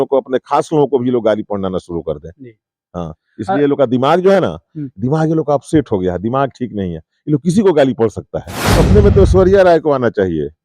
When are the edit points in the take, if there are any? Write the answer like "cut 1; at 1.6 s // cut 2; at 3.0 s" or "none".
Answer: cut 1; at 8.7 s